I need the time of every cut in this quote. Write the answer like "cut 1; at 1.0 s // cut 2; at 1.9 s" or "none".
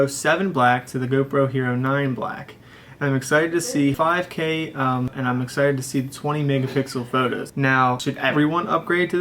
cut 1; at 3.9 s // cut 2; at 5.1 s // cut 3; at 7.9 s